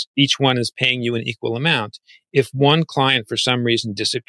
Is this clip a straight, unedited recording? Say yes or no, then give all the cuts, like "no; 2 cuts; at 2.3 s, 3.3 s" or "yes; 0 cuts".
yes; 0 cuts